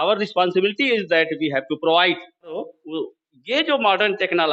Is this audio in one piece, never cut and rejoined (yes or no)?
no